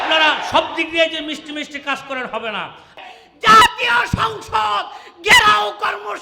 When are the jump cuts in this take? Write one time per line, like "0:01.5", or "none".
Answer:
0:03.0